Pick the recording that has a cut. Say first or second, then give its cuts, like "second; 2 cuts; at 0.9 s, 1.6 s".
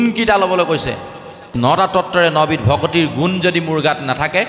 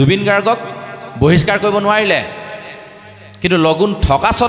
first; 1 cut; at 1.4 s